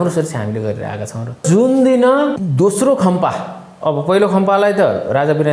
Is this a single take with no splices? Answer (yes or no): no